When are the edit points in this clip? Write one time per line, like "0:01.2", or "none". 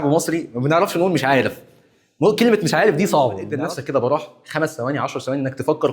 0:03.5